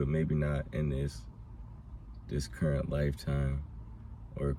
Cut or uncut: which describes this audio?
uncut